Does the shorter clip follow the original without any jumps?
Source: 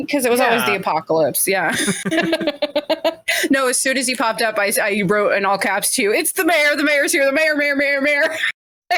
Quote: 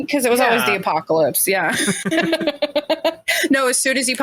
yes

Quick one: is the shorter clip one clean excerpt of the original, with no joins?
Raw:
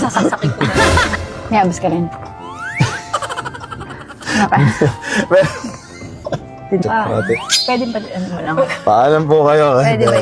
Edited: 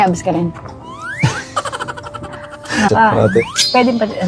no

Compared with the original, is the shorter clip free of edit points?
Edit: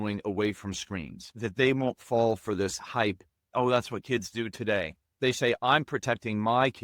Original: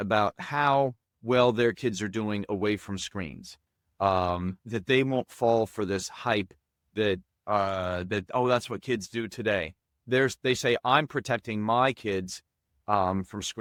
no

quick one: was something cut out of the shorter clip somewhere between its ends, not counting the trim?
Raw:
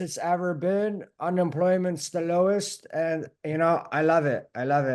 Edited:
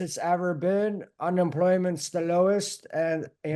no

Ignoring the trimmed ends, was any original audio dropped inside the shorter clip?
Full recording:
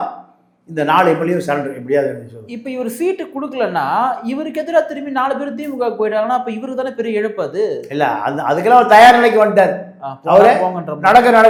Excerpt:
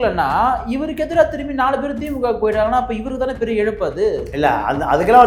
no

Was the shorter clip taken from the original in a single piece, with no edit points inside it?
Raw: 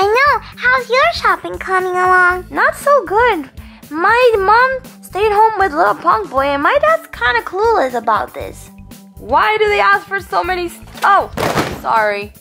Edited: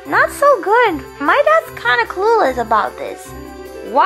no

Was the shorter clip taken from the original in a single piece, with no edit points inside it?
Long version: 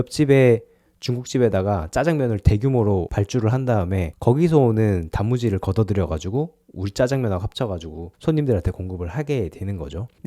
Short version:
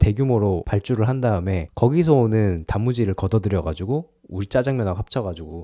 yes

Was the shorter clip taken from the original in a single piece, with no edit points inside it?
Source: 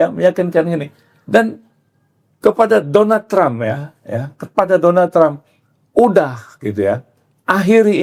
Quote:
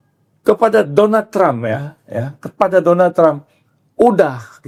yes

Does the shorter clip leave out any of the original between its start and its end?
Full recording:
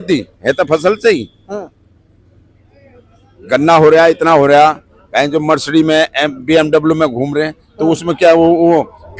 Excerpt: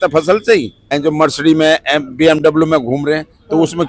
yes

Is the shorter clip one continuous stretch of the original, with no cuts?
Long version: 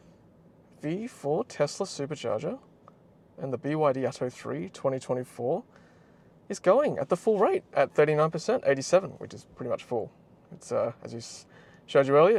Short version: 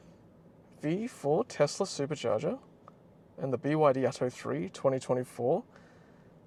yes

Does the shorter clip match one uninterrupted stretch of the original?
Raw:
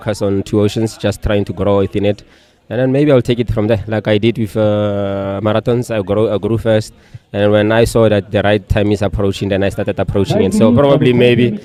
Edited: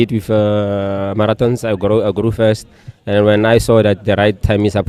yes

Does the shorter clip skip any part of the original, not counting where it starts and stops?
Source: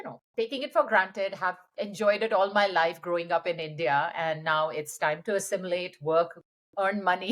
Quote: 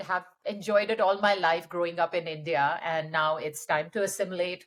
no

